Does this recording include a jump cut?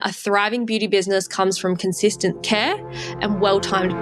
yes; 1 cut; at 2.4 s

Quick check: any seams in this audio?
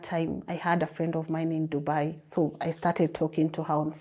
no; 0 cuts

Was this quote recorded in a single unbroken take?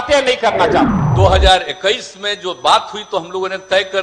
no; 1 cut; at 1.0 s

